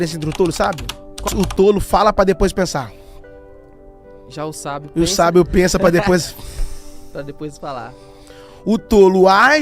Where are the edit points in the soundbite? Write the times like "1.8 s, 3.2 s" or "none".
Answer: 1.2 s

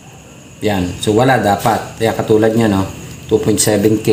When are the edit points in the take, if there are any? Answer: none

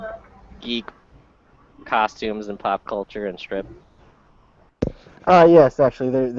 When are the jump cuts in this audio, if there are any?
5.0 s

